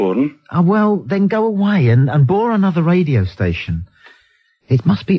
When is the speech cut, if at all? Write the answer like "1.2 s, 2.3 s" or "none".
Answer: 2.4 s